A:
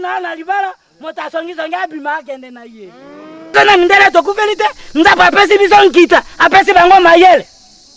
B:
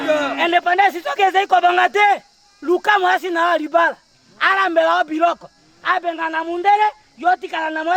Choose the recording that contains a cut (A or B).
A